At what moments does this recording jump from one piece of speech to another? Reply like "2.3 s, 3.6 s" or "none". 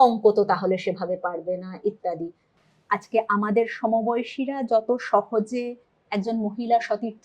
2.6 s

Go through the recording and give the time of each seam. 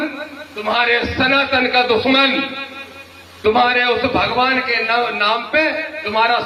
none

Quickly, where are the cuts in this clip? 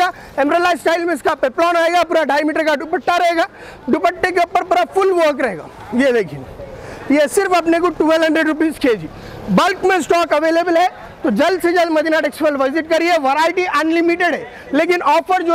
none

